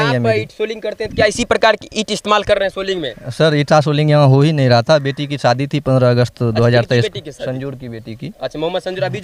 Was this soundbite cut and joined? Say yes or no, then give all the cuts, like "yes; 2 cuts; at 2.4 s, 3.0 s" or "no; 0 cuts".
no; 0 cuts